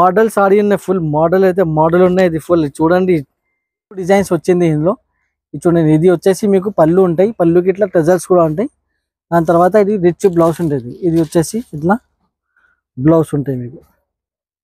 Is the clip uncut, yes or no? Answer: no